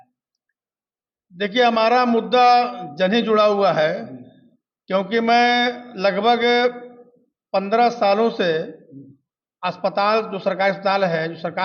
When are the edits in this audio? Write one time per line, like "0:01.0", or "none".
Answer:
none